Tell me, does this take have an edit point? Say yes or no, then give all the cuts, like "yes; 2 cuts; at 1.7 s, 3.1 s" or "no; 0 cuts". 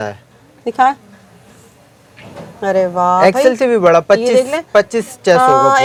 no; 0 cuts